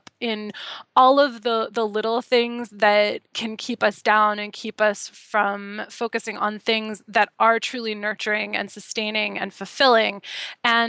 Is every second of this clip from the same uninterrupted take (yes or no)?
yes